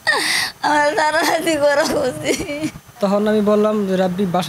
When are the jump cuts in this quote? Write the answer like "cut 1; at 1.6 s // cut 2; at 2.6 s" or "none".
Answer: cut 1; at 2.8 s